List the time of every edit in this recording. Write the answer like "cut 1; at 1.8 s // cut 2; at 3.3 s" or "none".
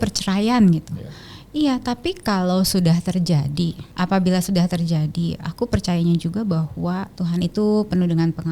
cut 1; at 3.8 s // cut 2; at 7.1 s